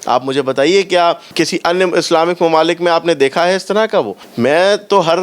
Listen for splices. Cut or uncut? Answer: cut